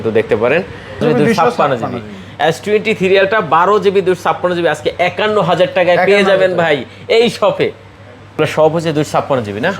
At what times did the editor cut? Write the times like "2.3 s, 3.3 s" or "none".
1.0 s, 8.4 s